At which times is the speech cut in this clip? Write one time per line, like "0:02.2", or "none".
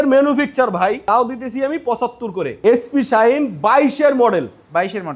0:01.0
0:02.4